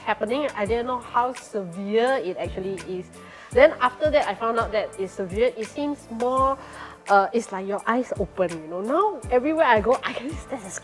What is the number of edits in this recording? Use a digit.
0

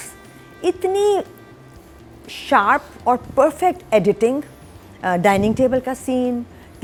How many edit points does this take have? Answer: 0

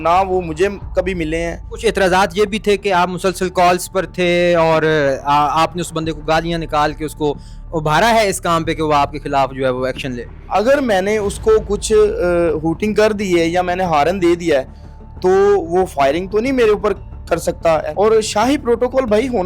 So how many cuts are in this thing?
3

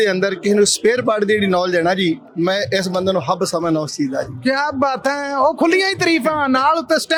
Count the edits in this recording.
0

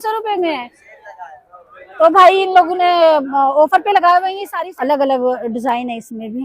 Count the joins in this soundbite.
1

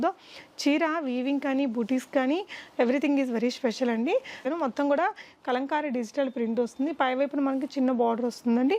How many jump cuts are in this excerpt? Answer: 1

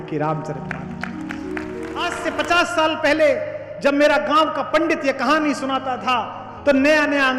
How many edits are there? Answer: 1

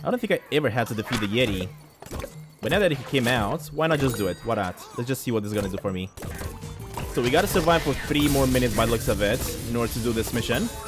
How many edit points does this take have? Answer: 1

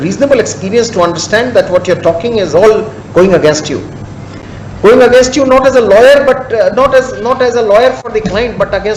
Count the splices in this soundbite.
0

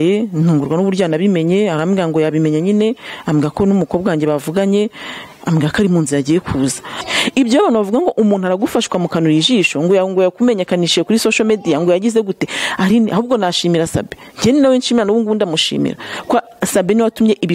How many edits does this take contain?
1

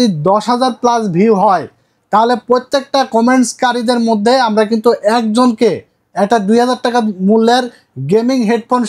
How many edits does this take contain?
0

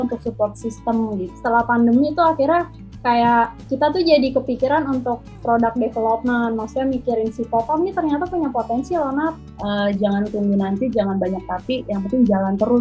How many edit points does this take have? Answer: 2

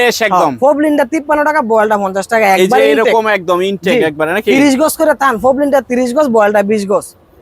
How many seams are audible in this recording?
0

